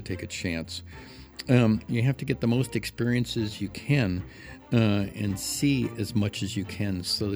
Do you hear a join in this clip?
no; 0 cuts

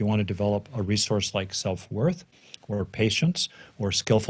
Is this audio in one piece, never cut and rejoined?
yes; 0 cuts

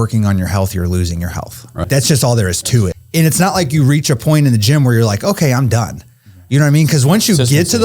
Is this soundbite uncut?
no; 2 cuts; at 1.8 s, 3.0 s

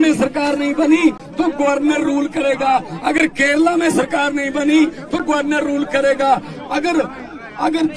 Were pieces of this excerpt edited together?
no; 0 cuts

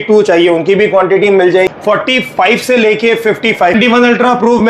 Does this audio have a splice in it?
yes; 2 cuts; at 1.7 s, 3.7 s

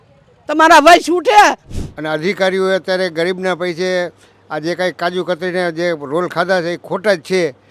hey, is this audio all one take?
no; 1 cut; at 1.7 s

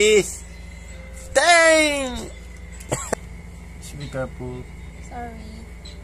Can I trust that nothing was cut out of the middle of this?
no; 1 cut; at 3.1 s

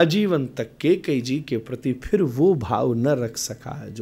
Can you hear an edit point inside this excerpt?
no; 0 cuts

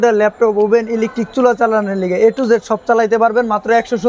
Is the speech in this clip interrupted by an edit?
no; 0 cuts

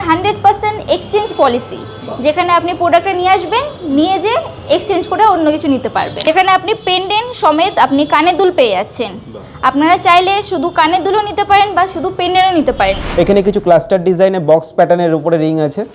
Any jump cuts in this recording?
yes; 2 cuts; at 6.1 s, 13.0 s

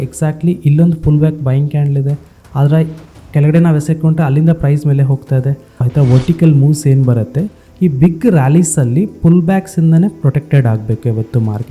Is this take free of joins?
no; 1 cut; at 5.8 s

